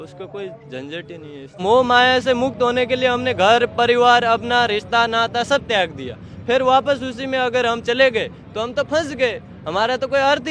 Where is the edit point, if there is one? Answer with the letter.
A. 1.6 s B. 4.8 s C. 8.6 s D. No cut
A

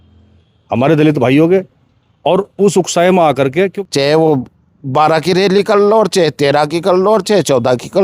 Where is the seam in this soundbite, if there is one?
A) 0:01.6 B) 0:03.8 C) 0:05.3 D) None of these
B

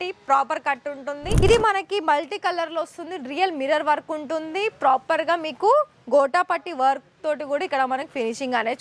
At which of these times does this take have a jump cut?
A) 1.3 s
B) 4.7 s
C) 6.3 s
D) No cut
A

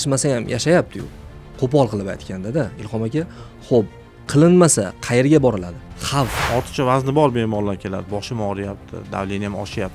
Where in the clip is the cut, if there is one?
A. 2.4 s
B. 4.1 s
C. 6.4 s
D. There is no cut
C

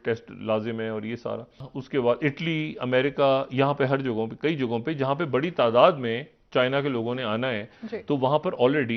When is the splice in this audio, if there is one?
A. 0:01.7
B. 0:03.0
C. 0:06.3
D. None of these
A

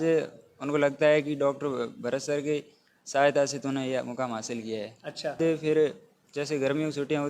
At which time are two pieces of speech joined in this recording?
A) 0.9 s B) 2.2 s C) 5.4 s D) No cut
C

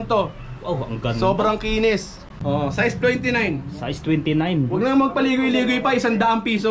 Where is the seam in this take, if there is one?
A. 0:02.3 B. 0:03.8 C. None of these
A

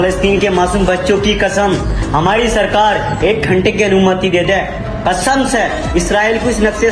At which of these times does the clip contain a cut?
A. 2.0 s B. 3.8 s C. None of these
C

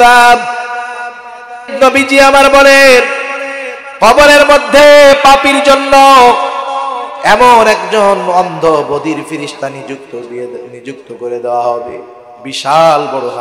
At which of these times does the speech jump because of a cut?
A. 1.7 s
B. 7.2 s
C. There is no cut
A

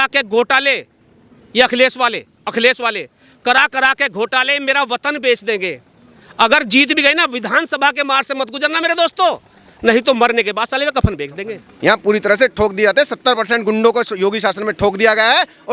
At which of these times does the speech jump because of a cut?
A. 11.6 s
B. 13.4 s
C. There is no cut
A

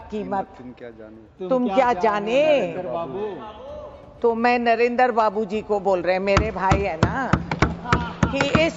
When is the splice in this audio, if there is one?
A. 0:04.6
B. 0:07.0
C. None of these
C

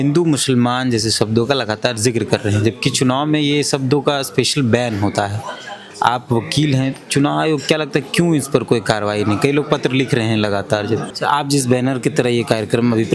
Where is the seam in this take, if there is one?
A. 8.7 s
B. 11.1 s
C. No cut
B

